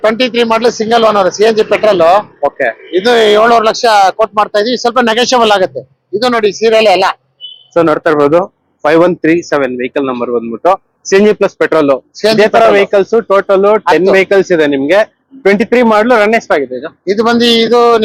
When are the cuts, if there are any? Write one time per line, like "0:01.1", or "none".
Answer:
none